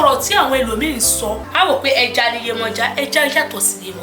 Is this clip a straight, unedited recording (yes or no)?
no